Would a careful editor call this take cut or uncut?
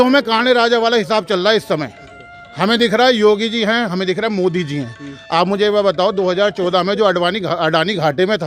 uncut